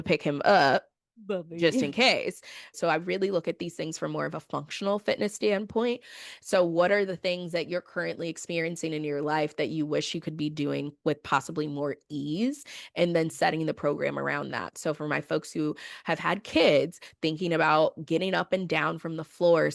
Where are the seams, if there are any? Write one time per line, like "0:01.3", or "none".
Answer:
0:02.8

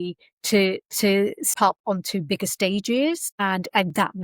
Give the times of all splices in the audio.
0:03.3

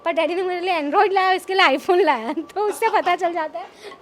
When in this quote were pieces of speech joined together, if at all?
none

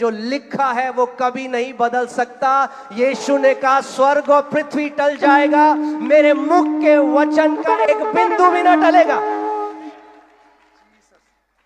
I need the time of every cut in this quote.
none

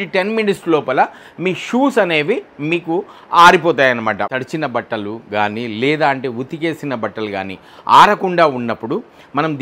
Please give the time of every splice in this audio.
0:04.3

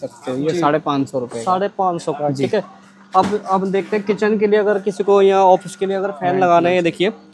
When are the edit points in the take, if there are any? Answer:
none

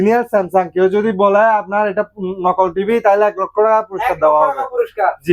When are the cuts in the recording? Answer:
none

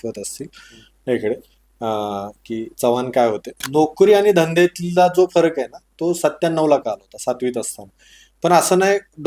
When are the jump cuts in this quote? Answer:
0:03.6

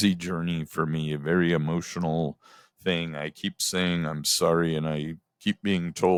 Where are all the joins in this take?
none

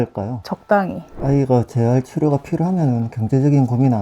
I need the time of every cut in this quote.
0:01.0

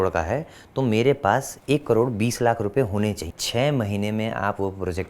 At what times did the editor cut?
0:03.3

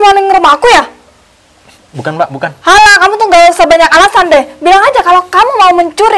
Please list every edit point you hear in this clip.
none

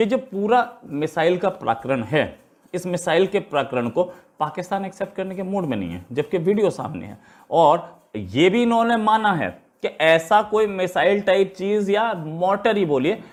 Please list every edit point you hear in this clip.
none

